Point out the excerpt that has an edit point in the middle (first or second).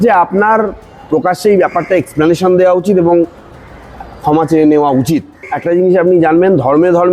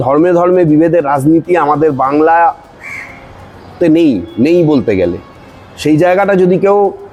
first